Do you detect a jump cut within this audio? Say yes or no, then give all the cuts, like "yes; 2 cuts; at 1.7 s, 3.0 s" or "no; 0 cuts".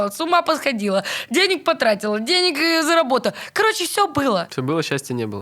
yes; 1 cut; at 4.5 s